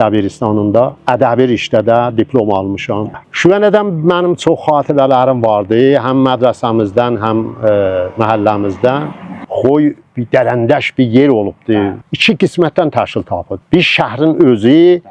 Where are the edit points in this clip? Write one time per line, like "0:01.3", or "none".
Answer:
0:03.2
0:09.5
0:12.0